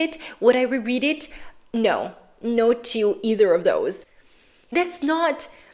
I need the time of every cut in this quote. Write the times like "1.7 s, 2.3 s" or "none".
4.2 s